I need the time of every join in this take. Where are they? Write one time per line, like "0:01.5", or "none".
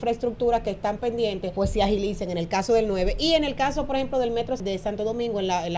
0:01.5
0:04.6